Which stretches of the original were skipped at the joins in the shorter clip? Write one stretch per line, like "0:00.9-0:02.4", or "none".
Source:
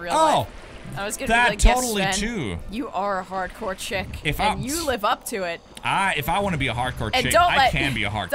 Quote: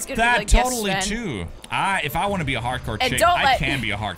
0:02.6-0:05.7